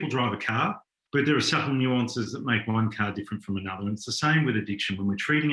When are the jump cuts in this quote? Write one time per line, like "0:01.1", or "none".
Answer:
0:00.9